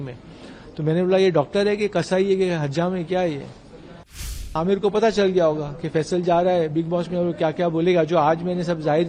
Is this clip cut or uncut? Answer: cut